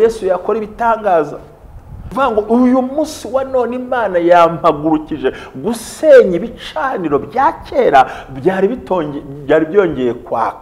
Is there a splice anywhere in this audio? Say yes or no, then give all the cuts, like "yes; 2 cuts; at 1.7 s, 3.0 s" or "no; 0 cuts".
yes; 1 cut; at 2.0 s